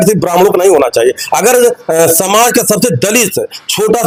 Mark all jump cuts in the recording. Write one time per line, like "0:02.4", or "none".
none